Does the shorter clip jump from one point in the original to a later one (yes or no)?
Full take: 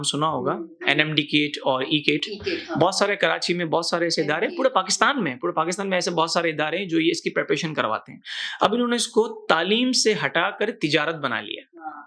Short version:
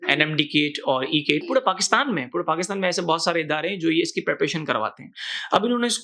yes